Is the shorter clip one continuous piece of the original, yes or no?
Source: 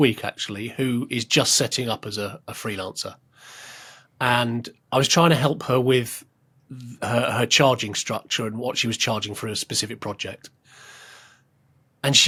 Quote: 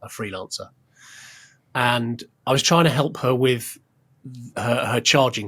yes